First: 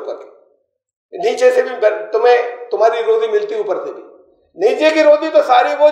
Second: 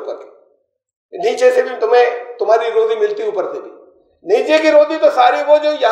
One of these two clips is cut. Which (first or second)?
second